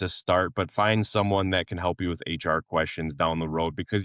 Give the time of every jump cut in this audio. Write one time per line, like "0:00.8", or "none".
none